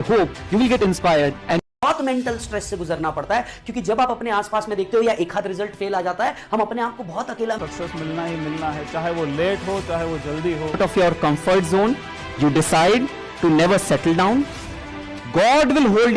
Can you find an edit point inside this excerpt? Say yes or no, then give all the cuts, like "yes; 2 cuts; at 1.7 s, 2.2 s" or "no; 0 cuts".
yes; 2 cuts; at 1.6 s, 7.6 s